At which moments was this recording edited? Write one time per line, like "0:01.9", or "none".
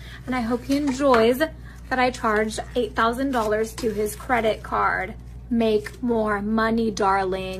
none